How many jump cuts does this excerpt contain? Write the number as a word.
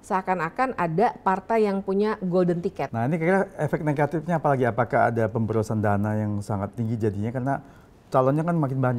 one